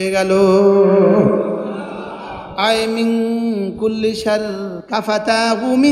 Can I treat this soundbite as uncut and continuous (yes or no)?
no